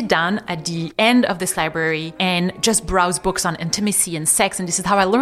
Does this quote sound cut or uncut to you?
uncut